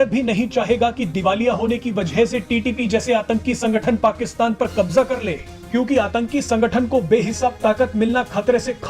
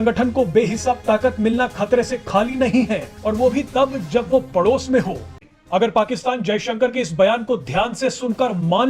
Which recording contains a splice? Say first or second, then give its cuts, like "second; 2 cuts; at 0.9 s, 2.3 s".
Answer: second; 1 cut; at 5.3 s